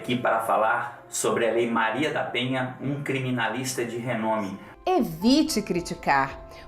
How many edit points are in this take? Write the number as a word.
one